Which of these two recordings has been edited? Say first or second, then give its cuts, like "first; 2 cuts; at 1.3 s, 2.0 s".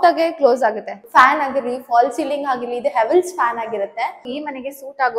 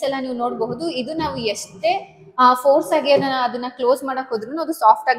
first; 2 cuts; at 0.9 s, 4.2 s